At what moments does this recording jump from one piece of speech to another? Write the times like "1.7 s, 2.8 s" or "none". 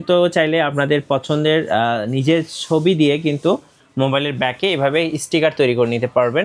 none